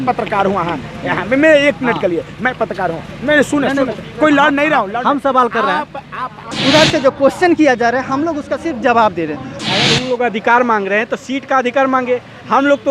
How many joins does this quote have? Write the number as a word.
two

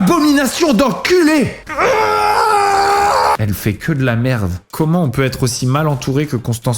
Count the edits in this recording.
two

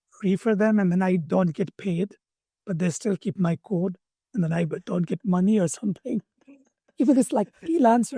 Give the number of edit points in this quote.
zero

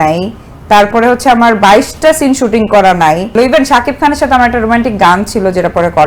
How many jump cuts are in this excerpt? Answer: one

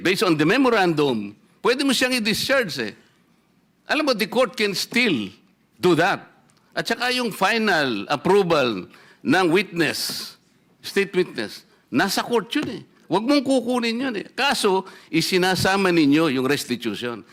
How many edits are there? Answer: zero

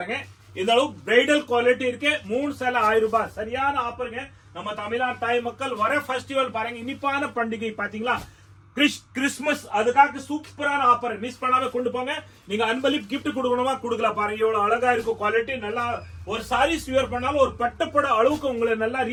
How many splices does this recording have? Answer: zero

